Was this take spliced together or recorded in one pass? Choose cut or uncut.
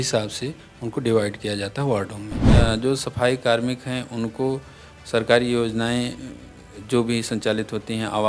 cut